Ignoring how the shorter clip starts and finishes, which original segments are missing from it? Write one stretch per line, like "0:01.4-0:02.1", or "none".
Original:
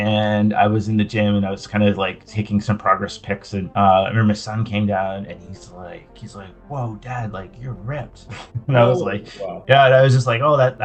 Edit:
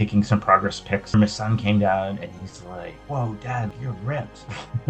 0:03.4-0:04.1
0:06.0-0:06.6
0:07.3-0:07.5